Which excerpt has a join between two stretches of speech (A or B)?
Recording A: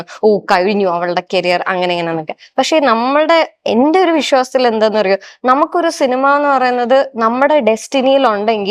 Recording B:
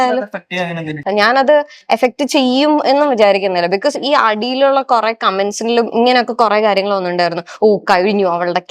B